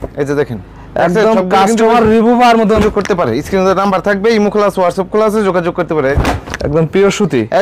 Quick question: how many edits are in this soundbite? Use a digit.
2